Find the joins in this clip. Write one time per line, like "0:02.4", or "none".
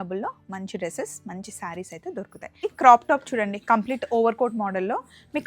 0:02.6